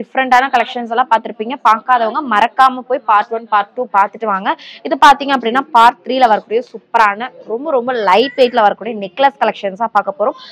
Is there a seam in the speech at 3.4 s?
no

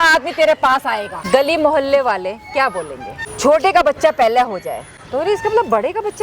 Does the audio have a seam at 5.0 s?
no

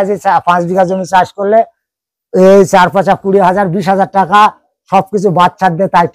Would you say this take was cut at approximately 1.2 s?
no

